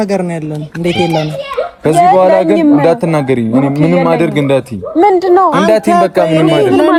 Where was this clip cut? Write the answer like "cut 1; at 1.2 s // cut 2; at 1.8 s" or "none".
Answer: none